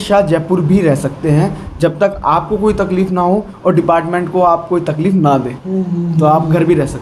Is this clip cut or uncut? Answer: uncut